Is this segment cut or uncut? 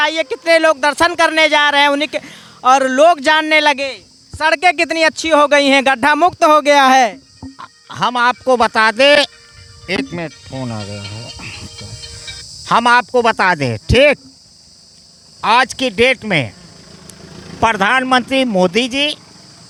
uncut